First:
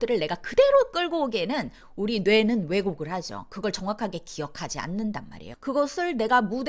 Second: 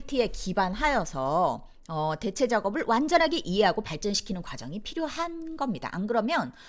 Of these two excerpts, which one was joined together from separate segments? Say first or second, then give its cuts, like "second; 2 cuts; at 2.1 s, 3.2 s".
first; 1 cut; at 5.5 s